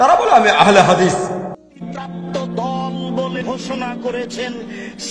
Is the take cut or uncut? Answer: cut